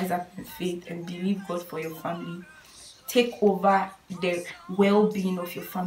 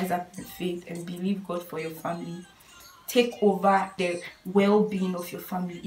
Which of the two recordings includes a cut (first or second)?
second